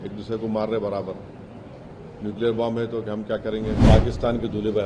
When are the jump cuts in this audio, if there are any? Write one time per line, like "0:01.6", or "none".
0:03.8